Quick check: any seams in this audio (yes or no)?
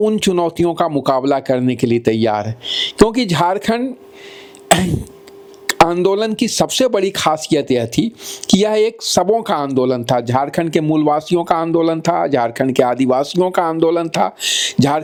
no